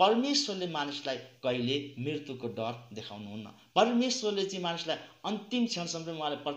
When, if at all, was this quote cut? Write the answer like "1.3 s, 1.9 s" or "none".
none

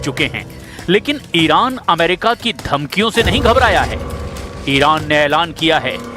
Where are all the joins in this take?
3.4 s

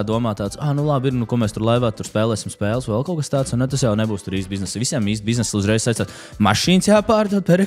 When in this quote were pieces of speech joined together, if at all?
none

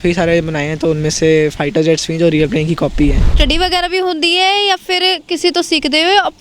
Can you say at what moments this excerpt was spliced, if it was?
3.3 s

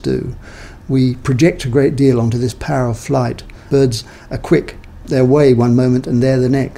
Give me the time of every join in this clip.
3.5 s

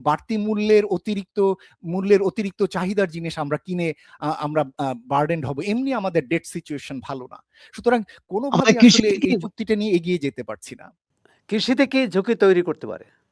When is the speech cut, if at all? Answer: none

